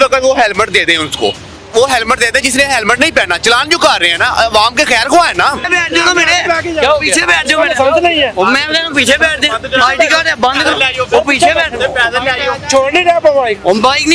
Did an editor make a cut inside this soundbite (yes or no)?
yes